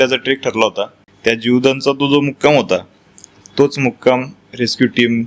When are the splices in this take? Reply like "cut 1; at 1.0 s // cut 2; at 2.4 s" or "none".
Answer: cut 1; at 1.0 s